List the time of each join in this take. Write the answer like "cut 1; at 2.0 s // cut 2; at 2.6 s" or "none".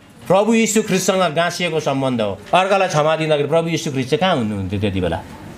cut 1; at 2.4 s